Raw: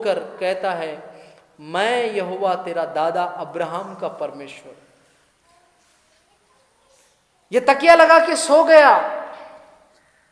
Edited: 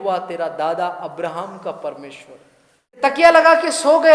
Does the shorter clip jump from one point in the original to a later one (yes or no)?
yes